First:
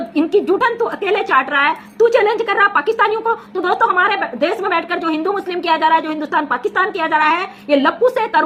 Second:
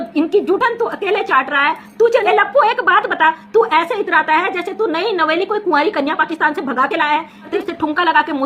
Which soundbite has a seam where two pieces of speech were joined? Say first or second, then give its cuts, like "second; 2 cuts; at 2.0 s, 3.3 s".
second; 2 cuts; at 2.2 s, 7.5 s